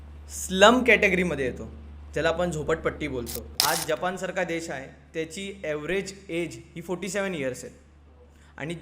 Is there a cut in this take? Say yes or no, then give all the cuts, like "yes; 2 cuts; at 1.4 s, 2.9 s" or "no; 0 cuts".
yes; 1 cut; at 3.5 s